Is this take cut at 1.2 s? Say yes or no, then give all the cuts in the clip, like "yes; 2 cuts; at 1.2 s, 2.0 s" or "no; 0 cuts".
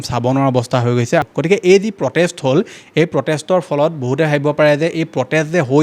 yes; 1 cut; at 1.2 s